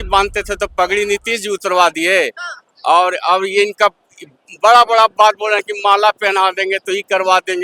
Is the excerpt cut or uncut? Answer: uncut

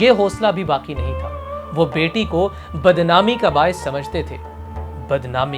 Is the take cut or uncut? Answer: uncut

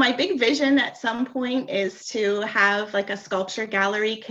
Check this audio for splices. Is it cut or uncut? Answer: uncut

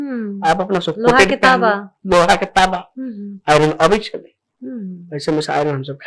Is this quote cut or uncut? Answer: uncut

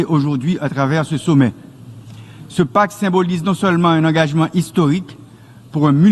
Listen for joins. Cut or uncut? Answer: uncut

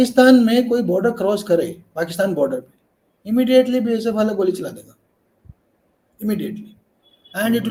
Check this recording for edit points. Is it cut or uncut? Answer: uncut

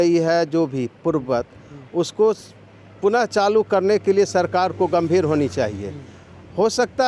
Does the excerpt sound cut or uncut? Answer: uncut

